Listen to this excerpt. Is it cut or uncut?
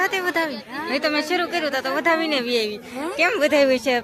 uncut